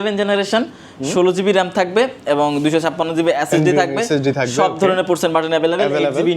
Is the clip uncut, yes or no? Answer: yes